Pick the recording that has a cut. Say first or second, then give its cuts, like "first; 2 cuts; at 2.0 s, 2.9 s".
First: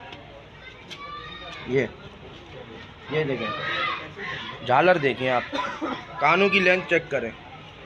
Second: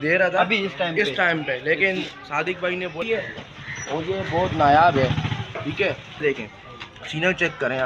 second; 2 cuts; at 3.0 s, 6.2 s